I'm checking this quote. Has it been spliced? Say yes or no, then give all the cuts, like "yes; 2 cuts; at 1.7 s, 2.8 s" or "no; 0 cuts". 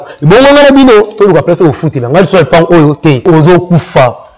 yes; 1 cut; at 3.2 s